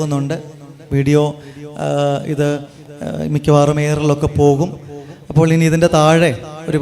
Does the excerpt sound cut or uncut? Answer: uncut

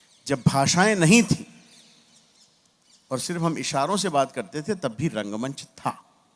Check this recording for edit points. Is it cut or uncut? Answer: uncut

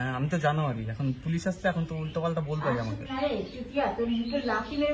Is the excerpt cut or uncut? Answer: uncut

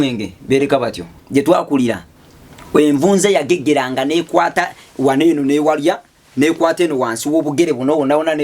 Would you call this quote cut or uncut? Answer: cut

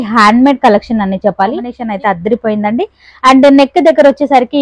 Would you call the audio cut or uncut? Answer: cut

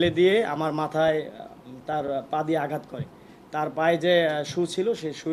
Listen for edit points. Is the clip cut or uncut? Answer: uncut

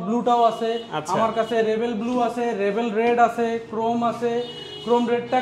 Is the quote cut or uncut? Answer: uncut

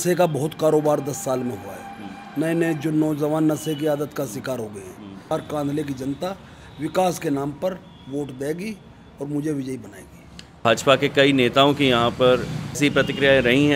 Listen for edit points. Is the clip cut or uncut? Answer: cut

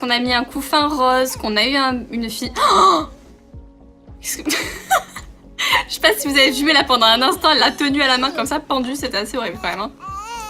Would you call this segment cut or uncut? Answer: cut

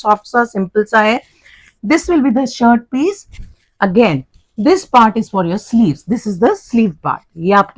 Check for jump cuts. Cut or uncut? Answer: uncut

